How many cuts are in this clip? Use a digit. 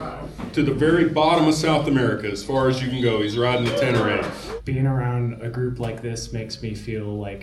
1